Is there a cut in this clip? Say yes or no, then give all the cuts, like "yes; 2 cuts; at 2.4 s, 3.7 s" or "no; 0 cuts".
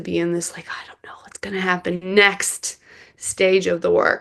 no; 0 cuts